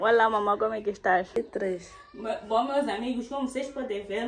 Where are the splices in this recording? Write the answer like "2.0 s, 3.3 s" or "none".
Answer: 1.5 s